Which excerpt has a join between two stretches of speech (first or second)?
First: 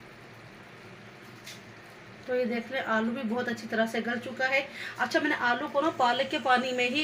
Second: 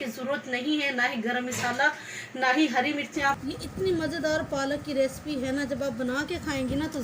second